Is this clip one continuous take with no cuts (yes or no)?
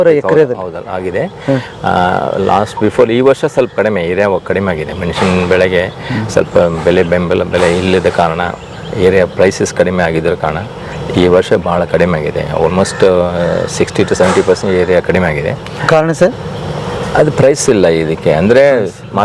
yes